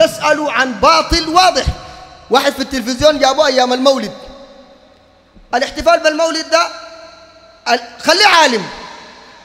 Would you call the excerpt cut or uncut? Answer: uncut